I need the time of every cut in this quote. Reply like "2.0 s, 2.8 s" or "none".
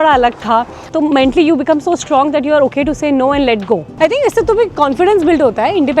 0.9 s, 3.9 s